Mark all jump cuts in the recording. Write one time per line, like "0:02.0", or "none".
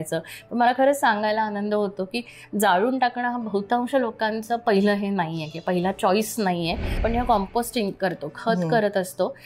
0:07.0

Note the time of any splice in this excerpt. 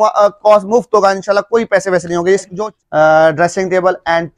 0:02.5

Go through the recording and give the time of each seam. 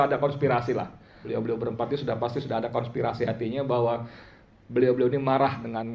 0:01.2

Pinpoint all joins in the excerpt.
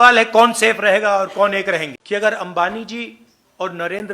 0:01.9

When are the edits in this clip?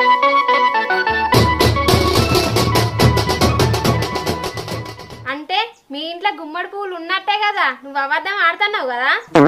0:04.7

